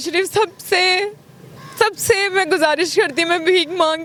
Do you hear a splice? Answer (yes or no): no